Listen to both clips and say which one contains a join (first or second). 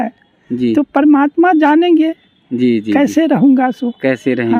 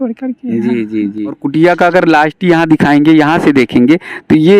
second